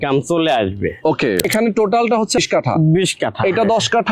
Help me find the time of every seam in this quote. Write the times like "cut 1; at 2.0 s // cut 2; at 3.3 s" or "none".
cut 1; at 1.4 s // cut 2; at 2.4 s